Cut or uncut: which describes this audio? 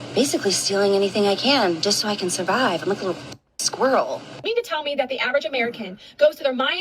cut